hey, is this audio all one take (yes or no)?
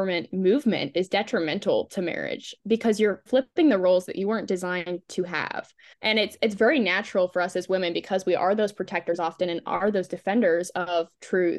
no